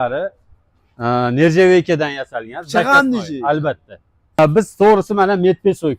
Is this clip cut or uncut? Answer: cut